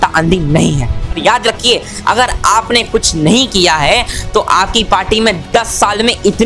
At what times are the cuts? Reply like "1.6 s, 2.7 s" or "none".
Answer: 1.2 s